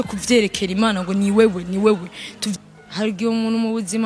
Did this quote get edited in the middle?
yes; 1 cut; at 2.5 s

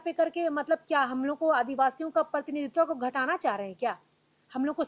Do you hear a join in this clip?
no; 0 cuts

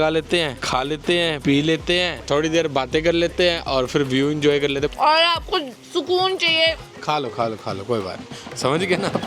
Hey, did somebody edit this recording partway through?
yes; 2 cuts; at 4.9 s, 5.8 s

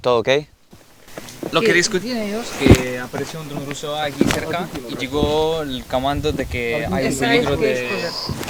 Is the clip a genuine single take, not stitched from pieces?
yes; 0 cuts

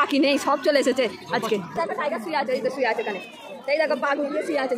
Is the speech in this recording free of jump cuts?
no; 1 cut; at 1.7 s

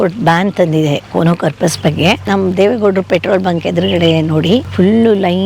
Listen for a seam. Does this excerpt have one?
yes; 2 cuts; at 2.2 s, 4.7 s

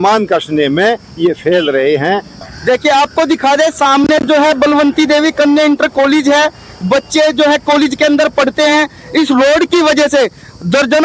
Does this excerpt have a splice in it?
yes; 1 cut; at 2.4 s

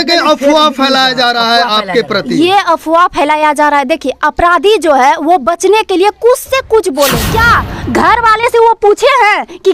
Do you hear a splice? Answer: yes; 1 cut; at 7.2 s

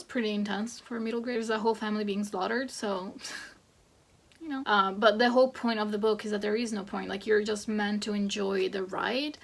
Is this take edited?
yes; 2 cuts; at 1.4 s, 4.6 s

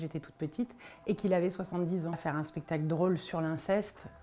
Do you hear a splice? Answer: yes; 1 cut; at 2.2 s

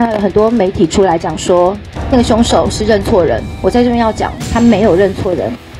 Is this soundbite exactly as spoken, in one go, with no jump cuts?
no; 1 cut; at 1.9 s

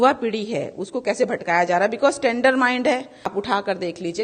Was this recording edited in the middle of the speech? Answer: yes; 1 cut; at 2.8 s

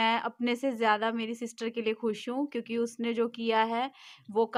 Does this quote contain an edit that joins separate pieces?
no; 0 cuts

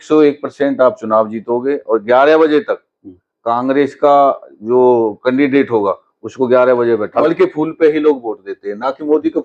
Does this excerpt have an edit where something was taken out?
yes; 1 cut; at 7.2 s

